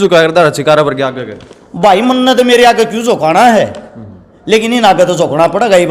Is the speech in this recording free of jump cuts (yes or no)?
yes